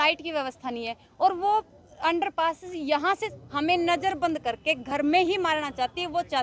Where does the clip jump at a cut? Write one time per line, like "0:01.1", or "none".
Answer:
0:03.3